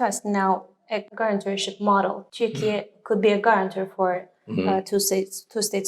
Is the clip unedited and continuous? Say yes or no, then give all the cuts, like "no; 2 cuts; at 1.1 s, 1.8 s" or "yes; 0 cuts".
no; 2 cuts; at 1.1 s, 2.2 s